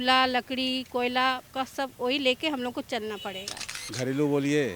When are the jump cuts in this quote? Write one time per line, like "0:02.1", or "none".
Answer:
0:03.7